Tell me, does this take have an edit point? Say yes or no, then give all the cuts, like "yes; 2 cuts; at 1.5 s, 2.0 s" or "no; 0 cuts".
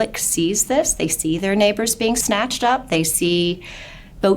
yes; 1 cut; at 2.2 s